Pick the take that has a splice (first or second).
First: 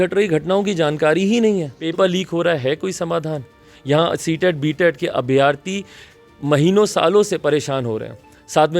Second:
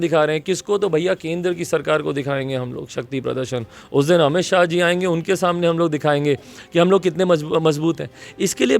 first